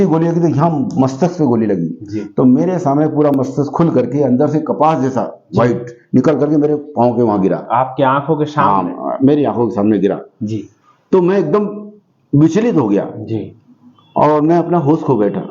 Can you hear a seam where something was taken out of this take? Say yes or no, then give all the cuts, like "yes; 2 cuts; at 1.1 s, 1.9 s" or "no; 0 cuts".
no; 0 cuts